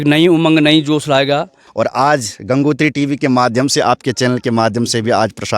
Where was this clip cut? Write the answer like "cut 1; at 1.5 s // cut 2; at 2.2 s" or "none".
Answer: cut 1; at 1.6 s